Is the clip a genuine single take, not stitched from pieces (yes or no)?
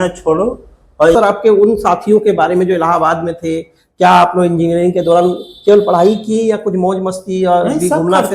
no